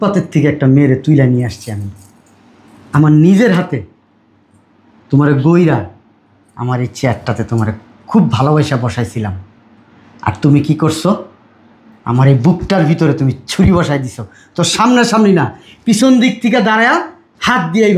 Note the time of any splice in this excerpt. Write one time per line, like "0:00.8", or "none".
none